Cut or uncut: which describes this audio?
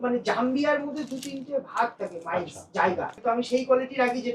cut